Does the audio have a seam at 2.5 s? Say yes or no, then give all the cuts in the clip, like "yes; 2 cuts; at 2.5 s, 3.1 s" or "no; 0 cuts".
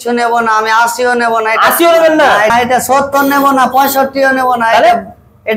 yes; 1 cut; at 2.5 s